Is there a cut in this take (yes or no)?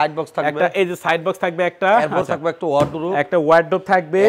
no